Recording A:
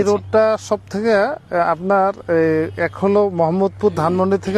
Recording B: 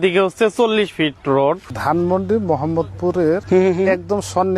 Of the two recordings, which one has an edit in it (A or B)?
B